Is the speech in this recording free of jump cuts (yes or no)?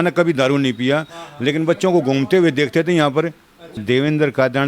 no